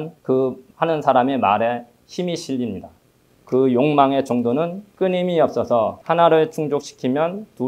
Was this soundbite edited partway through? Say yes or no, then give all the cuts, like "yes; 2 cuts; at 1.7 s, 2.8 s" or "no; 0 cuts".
yes; 2 cuts; at 3.1 s, 4.8 s